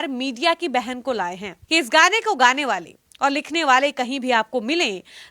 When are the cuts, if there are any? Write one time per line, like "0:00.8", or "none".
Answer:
0:01.5